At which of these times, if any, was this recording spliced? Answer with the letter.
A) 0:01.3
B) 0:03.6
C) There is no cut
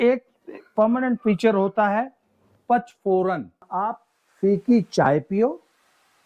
B